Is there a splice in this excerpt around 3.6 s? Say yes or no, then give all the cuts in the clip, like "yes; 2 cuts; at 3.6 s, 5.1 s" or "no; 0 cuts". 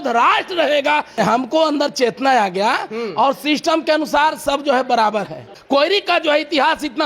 no; 2 cuts; at 1.1 s, 5.5 s